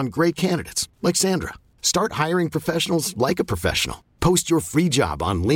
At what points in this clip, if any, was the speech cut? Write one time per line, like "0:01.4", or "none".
none